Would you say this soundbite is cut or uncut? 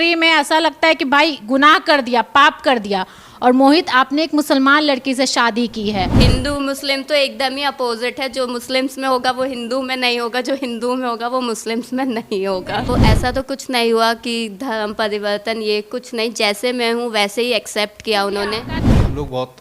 cut